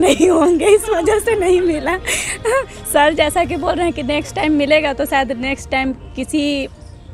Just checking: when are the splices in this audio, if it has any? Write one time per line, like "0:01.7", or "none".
none